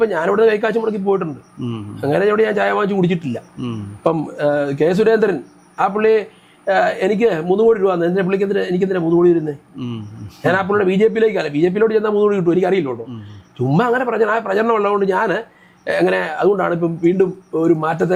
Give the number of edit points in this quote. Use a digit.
0